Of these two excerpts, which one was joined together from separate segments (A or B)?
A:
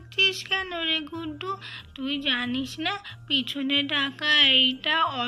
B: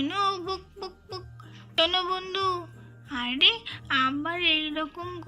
B